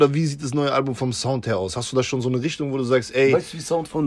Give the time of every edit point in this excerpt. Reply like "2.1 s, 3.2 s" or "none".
none